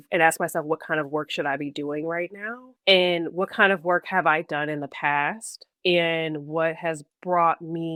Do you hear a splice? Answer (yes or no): no